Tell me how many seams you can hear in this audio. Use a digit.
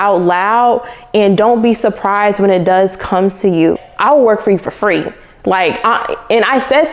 1